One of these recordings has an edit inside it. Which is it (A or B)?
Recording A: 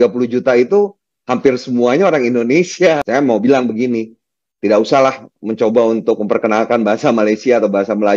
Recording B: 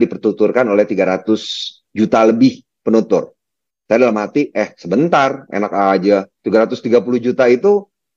A